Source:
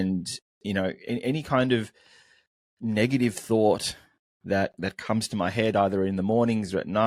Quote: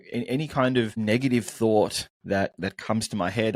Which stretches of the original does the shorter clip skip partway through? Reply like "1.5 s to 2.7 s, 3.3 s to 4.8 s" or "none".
1.9 s to 2.8 s, 4.0 s to 4.3 s